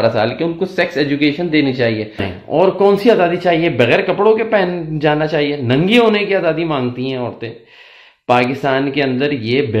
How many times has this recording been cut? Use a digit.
1